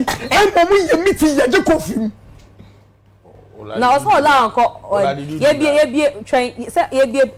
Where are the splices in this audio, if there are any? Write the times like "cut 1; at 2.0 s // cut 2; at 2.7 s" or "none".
none